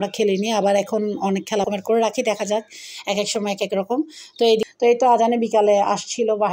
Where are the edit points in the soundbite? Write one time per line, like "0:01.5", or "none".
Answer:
0:01.7
0:04.6